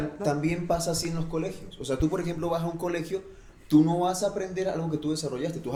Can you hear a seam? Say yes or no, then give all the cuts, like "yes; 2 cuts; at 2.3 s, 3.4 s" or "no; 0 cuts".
no; 0 cuts